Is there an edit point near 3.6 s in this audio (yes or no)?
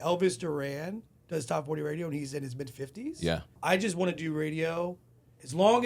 yes